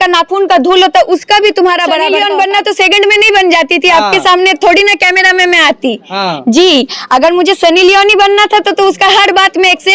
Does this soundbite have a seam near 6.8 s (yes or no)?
no